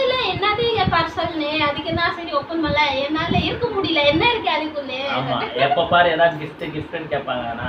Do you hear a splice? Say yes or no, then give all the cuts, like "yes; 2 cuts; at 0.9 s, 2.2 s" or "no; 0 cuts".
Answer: no; 0 cuts